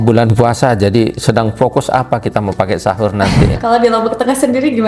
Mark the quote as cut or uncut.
cut